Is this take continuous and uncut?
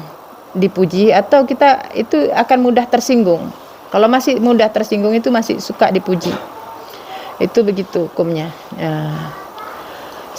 yes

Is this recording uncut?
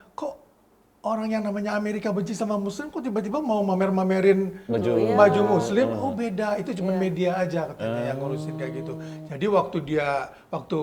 yes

